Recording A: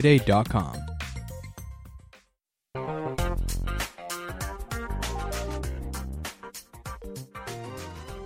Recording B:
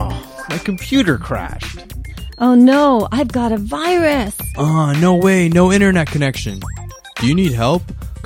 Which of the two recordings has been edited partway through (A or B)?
A